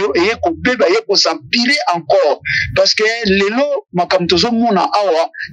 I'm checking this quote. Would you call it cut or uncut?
uncut